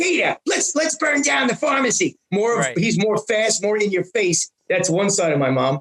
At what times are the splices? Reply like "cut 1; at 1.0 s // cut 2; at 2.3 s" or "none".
none